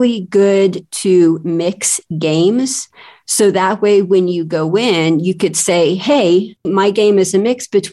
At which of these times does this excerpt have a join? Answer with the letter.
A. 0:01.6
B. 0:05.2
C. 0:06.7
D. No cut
C